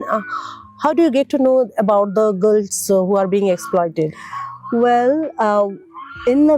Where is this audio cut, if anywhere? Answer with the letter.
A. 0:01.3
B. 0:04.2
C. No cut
C